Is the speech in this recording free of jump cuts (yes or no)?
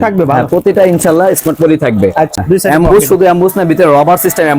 no